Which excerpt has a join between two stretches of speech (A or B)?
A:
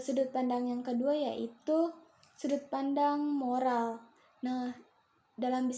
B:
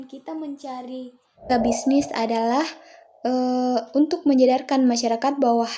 B